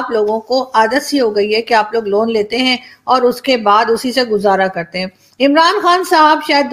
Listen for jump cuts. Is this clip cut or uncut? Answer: uncut